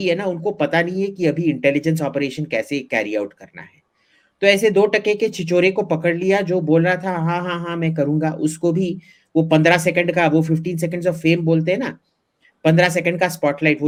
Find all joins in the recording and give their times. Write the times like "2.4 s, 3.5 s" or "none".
none